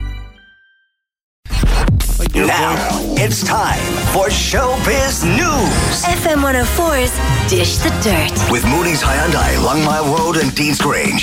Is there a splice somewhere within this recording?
yes; 1 cut; at 1.6 s

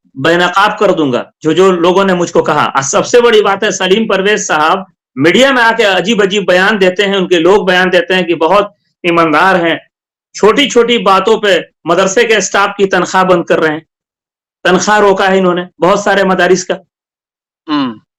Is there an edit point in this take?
no; 0 cuts

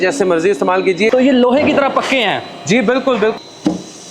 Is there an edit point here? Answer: yes; 2 cuts; at 1.1 s, 3.3 s

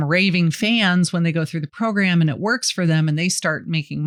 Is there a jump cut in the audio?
no; 0 cuts

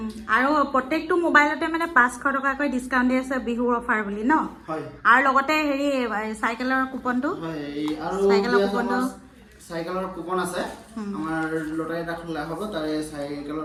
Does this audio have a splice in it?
no; 0 cuts

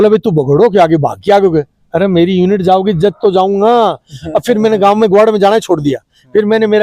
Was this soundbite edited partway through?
no; 0 cuts

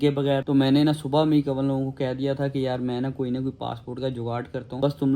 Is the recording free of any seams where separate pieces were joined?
yes; 0 cuts

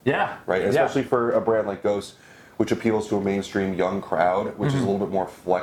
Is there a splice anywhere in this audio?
no; 0 cuts

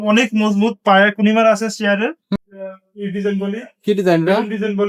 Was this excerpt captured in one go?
no; 1 cut; at 2.4 s

